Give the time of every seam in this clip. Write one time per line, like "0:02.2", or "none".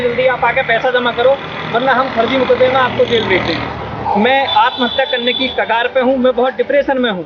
0:03.9